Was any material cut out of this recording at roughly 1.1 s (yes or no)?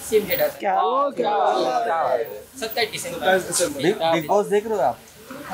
no